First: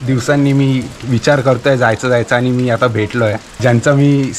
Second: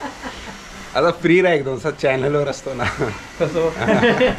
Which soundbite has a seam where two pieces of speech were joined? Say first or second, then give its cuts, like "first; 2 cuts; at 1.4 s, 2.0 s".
first; 1 cut; at 3.5 s